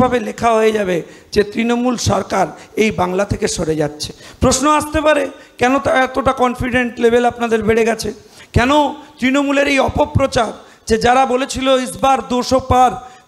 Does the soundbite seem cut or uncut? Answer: uncut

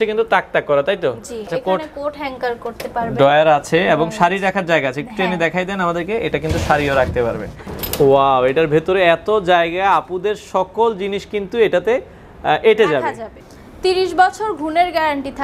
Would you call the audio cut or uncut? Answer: cut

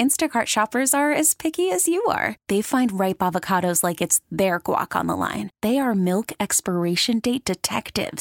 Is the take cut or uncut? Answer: uncut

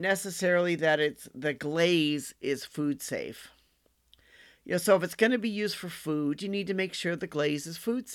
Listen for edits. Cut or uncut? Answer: uncut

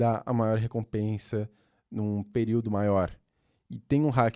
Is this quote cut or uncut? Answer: uncut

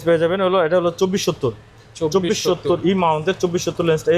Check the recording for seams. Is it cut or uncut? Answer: uncut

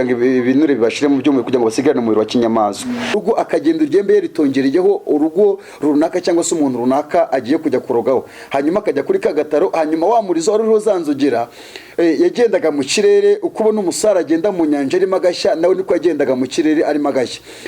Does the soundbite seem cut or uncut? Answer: cut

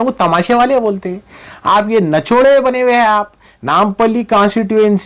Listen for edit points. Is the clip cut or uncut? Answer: uncut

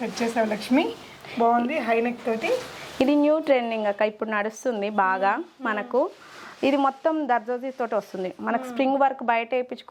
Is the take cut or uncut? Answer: uncut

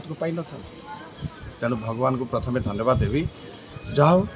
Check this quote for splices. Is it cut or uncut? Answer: uncut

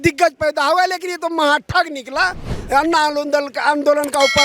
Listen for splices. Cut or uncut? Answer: uncut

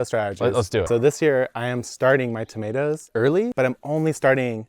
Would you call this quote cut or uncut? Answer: cut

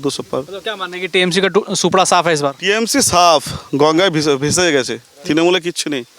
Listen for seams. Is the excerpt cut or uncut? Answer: uncut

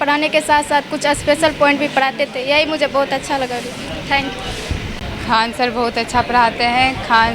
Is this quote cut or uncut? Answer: uncut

